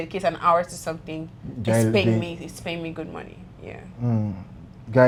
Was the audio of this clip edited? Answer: no; 0 cuts

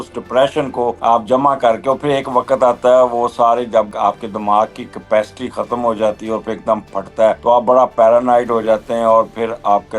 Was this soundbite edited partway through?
yes; 2 cuts; at 3.9 s, 7.4 s

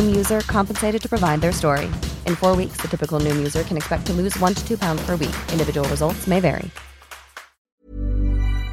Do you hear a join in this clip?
yes; 1 cut; at 7.8 s

